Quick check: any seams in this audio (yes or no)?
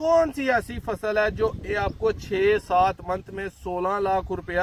no